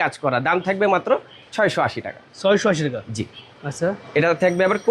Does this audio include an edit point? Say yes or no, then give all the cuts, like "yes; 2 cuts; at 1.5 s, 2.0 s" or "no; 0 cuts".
no; 0 cuts